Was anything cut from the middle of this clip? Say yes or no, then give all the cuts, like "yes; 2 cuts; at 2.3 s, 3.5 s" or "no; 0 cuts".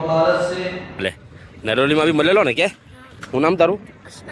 yes; 1 cut; at 1.2 s